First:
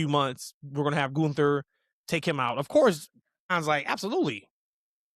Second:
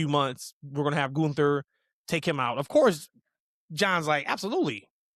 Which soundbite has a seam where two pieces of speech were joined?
first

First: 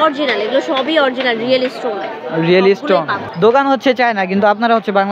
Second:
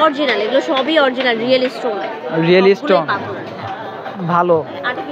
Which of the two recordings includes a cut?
first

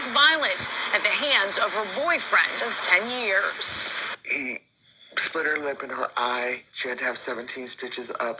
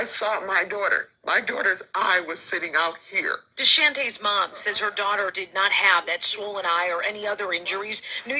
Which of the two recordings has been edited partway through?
second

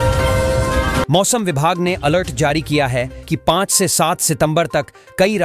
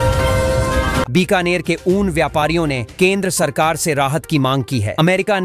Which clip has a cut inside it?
first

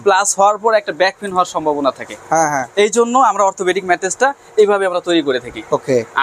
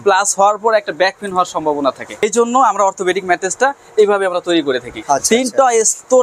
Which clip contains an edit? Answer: second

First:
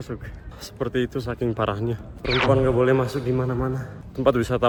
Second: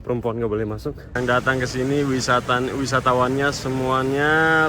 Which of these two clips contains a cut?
second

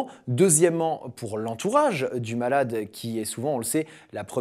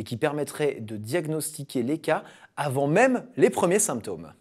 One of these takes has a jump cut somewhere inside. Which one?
second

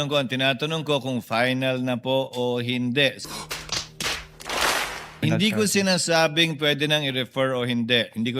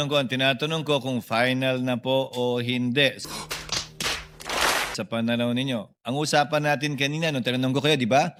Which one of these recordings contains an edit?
first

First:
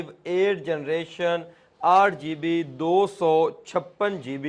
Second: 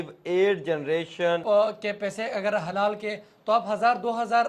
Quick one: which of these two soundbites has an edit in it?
second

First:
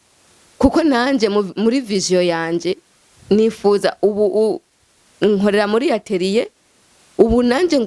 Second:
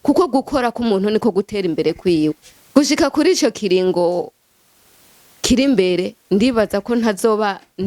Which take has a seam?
second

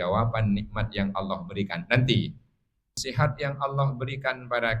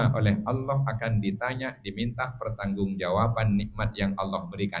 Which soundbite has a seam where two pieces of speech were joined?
first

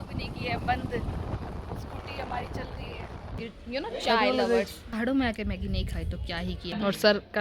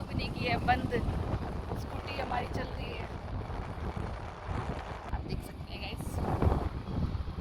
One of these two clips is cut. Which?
first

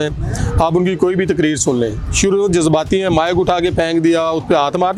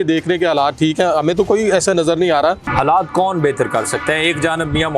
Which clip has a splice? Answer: second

